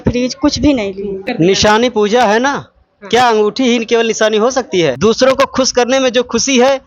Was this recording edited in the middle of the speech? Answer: yes; 2 cuts; at 1.2 s, 4.9 s

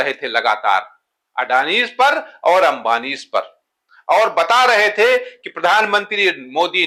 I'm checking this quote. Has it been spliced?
no; 0 cuts

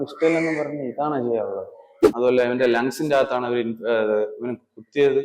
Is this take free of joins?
no; 1 cut; at 2.0 s

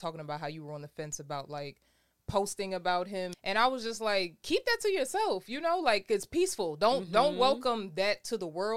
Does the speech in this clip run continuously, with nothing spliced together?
no; 1 cut; at 3.3 s

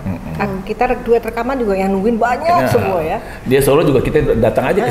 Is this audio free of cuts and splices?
yes; 0 cuts

